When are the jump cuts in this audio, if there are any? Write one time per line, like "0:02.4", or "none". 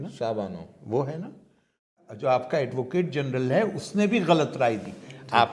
0:01.9